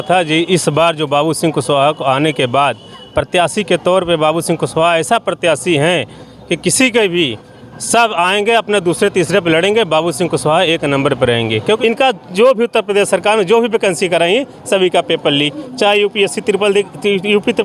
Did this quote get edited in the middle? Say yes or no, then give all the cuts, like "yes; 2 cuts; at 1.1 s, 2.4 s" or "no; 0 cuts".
yes; 1 cut; at 11.8 s